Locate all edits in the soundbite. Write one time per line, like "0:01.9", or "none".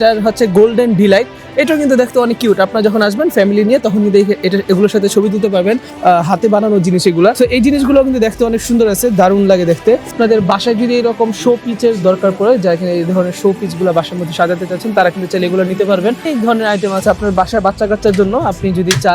0:05.9
0:07.4
0:10.1
0:16.2